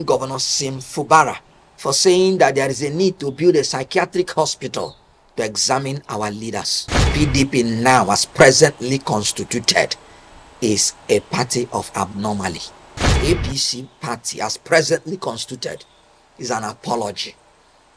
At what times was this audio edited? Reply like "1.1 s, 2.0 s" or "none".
7.1 s, 13.1 s